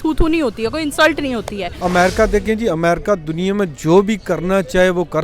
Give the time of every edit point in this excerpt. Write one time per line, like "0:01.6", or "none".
0:01.7